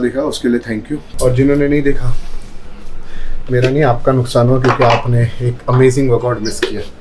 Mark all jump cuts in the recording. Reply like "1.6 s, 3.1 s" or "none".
1.0 s